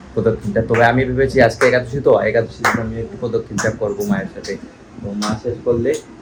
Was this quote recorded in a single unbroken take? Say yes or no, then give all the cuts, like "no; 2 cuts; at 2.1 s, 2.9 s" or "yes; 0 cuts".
yes; 0 cuts